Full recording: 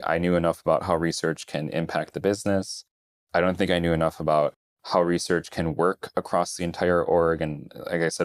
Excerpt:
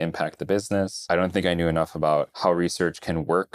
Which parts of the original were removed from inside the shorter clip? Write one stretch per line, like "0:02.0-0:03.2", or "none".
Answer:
0:02.7-0:03.2
0:04.6-0:04.8